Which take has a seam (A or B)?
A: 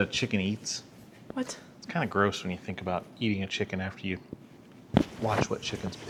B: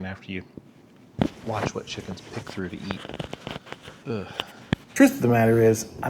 B